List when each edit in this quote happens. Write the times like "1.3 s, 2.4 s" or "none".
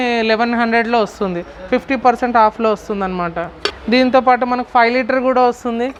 none